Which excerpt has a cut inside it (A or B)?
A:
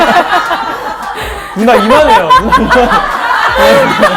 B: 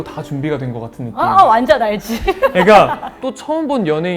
B